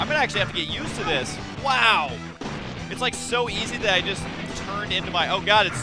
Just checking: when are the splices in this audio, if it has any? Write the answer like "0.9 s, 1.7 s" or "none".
none